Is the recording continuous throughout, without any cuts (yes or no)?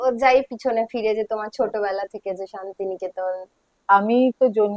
no